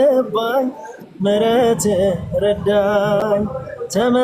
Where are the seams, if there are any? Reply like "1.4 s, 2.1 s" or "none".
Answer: none